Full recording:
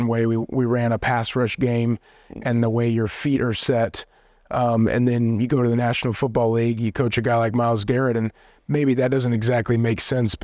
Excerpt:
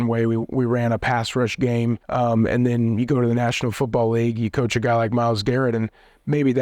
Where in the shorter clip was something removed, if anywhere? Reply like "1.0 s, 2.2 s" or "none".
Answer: 2.0 s